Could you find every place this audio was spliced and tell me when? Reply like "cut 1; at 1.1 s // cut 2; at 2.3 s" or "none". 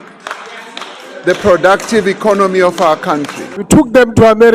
cut 1; at 3.5 s